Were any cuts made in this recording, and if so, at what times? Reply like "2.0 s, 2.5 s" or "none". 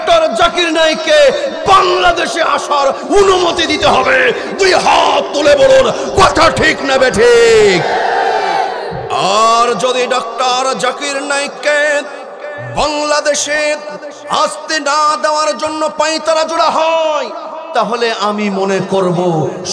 none

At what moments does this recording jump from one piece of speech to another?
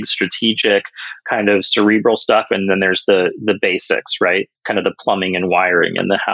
none

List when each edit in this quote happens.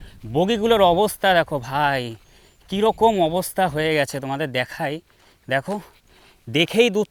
none

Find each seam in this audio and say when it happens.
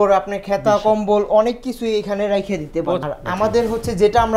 3.0 s

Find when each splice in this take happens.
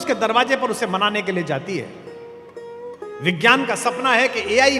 none

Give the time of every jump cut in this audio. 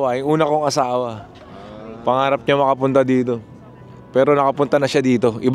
none

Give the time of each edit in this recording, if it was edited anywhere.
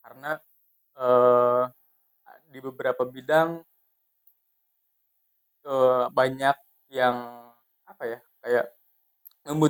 none

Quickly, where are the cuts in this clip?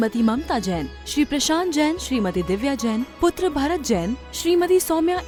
none

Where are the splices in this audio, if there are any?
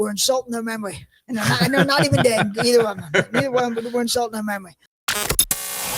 5.0 s

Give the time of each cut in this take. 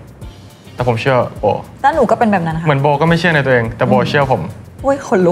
1.7 s

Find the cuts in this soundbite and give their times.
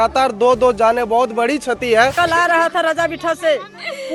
2.1 s

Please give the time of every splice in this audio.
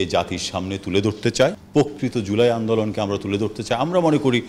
1.6 s

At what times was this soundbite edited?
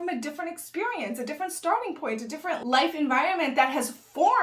2.6 s

